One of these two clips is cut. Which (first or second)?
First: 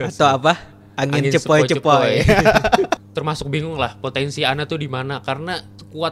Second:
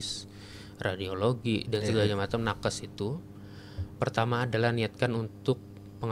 first